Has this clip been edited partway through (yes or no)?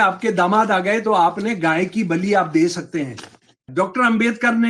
yes